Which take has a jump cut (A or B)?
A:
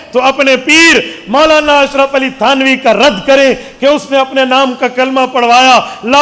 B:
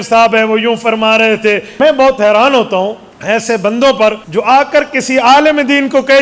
B